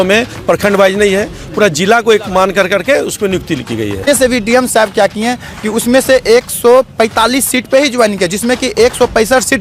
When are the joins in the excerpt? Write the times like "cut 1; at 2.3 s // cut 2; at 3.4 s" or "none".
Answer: cut 1; at 4.1 s